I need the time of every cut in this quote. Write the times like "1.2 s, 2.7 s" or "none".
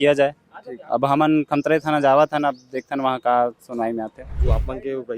4.3 s